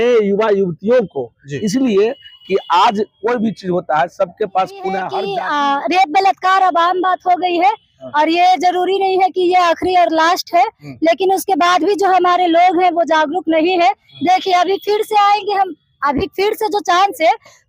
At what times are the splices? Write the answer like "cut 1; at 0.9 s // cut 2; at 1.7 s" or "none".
cut 1; at 5.1 s